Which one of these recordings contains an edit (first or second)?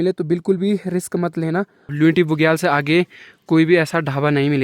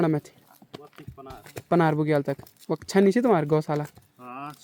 first